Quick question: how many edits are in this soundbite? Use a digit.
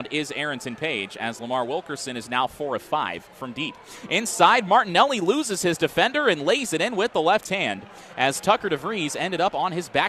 0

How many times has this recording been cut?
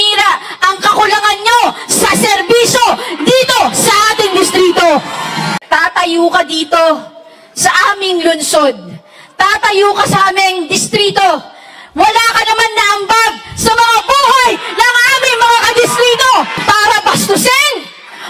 2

